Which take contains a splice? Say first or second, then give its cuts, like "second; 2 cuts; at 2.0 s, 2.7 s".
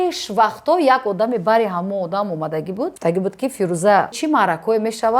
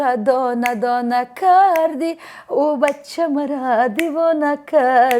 first; 2 cuts; at 2.9 s, 4.2 s